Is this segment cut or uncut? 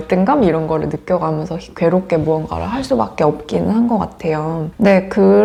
uncut